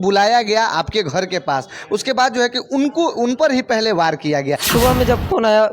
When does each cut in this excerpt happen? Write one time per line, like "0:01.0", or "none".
0:04.7